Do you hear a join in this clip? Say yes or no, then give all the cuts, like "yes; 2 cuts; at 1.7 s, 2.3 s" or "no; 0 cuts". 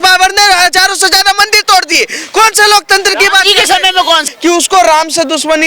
yes; 1 cut; at 4.2 s